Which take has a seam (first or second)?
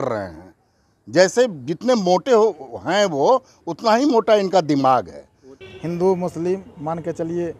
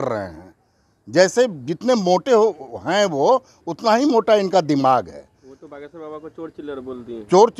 first